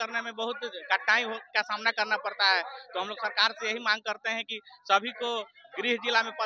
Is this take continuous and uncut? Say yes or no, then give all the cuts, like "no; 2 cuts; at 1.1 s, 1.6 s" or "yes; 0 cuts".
yes; 0 cuts